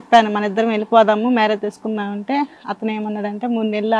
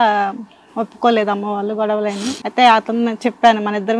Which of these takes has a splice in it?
second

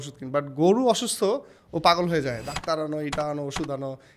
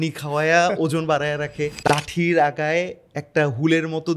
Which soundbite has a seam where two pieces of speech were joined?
second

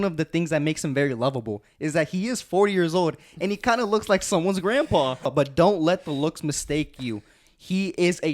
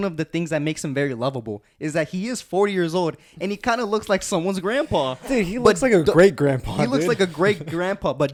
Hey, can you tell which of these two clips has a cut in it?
first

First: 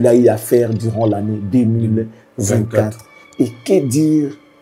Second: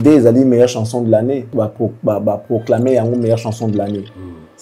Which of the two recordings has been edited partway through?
second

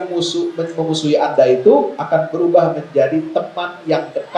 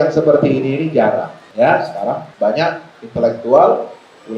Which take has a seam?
second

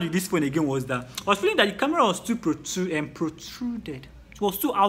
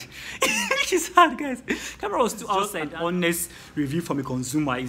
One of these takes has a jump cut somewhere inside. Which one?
second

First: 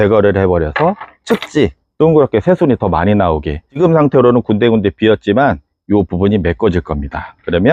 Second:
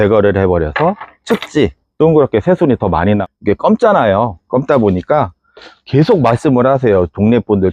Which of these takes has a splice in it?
second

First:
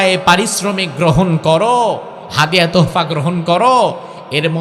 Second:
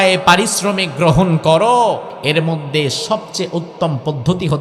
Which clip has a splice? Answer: second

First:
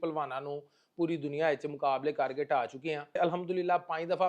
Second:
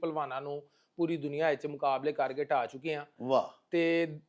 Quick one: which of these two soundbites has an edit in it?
first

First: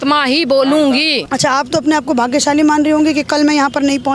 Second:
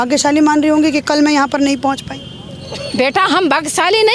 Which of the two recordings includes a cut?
first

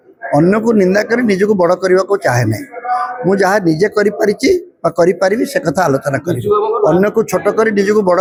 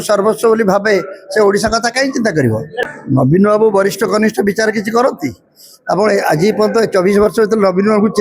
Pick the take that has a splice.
second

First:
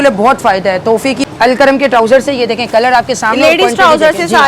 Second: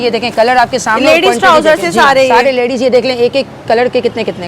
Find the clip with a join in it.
first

